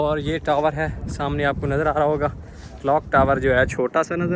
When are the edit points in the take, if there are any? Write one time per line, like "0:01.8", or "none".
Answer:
none